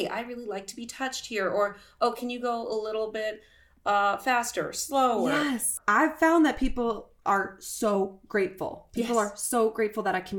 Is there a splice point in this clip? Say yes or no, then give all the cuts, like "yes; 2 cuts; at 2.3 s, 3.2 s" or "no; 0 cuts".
yes; 1 cut; at 5.8 s